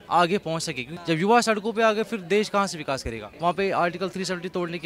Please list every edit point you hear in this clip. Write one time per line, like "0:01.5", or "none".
0:00.9
0:03.3